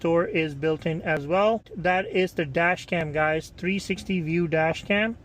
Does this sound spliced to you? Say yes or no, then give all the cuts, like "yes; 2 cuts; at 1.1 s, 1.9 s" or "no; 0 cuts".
no; 0 cuts